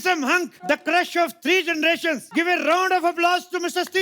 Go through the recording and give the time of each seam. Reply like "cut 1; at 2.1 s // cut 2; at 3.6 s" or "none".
cut 1; at 0.7 s // cut 2; at 2.3 s